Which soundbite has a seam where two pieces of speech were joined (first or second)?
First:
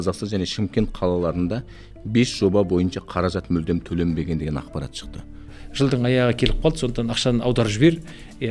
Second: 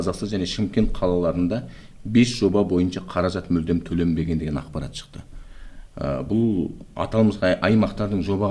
first